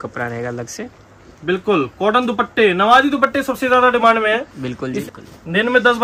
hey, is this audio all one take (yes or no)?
no